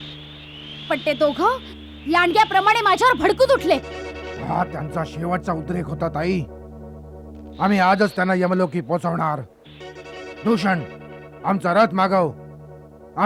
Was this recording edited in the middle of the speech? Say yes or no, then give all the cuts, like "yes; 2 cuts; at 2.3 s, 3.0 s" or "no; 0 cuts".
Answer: no; 0 cuts